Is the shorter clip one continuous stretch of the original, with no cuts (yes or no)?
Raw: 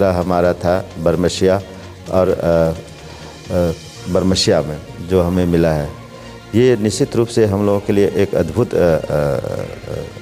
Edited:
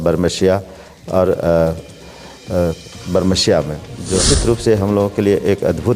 no